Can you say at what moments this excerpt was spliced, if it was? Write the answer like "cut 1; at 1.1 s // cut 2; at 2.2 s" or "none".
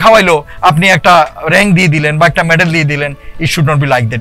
none